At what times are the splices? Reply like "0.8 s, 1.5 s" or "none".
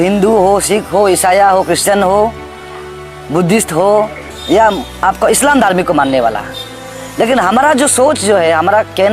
4.3 s